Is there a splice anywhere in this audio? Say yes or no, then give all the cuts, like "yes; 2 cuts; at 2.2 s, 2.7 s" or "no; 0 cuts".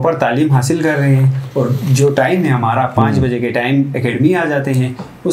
no; 0 cuts